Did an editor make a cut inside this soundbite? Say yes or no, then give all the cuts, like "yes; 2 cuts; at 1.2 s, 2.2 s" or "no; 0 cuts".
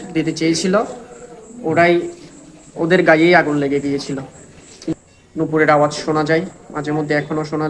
yes; 1 cut; at 4.9 s